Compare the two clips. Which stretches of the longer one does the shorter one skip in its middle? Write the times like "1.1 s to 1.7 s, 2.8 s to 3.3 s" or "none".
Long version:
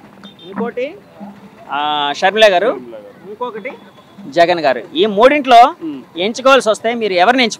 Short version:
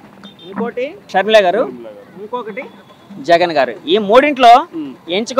1.1 s to 2.2 s